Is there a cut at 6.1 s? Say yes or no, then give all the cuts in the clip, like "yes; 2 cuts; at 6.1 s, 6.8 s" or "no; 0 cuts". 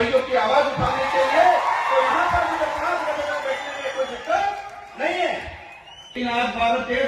yes; 1 cut; at 6.1 s